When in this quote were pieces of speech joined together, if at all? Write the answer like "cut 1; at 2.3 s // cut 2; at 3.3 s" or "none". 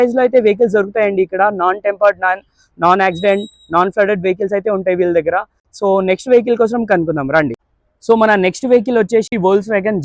none